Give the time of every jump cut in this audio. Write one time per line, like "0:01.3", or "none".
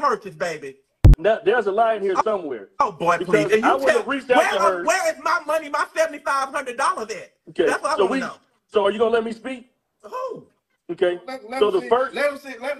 0:01.1